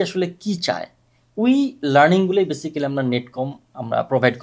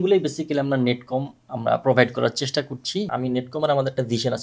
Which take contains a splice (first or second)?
second